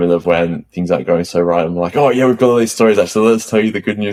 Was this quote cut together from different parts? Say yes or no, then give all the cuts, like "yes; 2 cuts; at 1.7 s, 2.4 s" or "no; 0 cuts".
no; 0 cuts